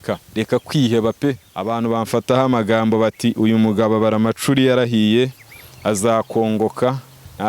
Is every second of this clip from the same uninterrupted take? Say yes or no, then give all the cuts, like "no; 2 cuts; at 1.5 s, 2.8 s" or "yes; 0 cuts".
no; 1 cut; at 1.5 s